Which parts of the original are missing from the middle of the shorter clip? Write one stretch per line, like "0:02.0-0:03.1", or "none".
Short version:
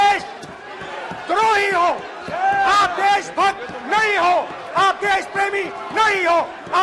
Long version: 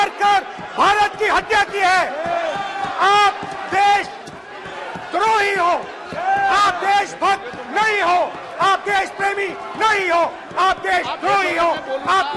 none